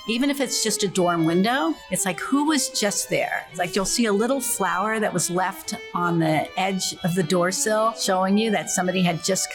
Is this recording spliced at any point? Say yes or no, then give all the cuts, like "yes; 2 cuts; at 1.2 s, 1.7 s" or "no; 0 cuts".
yes; 3 cuts; at 1.9 s, 3.4 s, 8.0 s